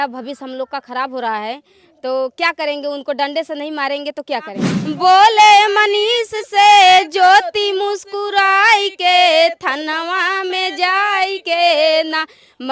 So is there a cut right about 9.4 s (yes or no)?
no